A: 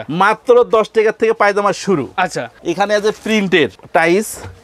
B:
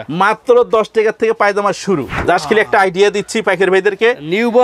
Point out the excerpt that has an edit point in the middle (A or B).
B